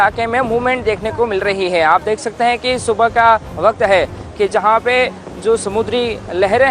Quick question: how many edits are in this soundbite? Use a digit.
1